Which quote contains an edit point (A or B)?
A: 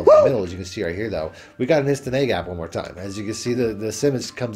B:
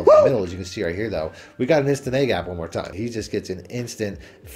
B